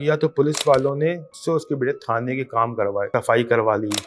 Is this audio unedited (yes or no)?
no